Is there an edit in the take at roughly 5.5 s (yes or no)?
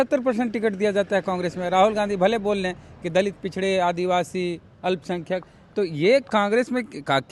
no